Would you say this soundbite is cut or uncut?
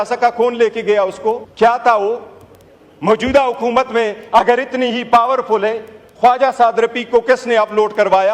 cut